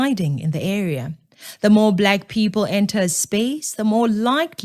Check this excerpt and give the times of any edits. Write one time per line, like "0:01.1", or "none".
0:02.1